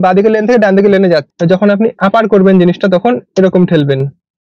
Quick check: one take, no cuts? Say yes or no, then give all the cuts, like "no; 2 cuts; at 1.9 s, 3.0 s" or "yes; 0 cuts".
no; 1 cut; at 1.3 s